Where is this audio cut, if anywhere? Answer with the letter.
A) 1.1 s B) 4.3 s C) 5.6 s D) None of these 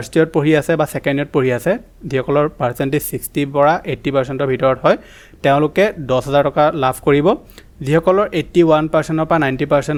D